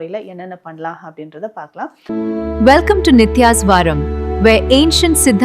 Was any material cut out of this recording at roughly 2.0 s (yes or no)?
yes